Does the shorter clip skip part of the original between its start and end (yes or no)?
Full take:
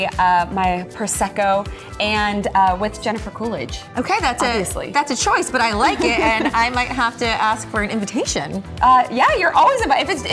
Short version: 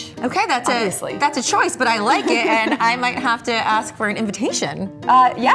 no